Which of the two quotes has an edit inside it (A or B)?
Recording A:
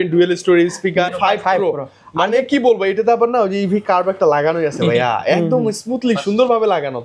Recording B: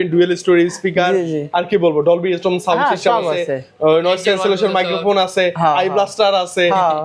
A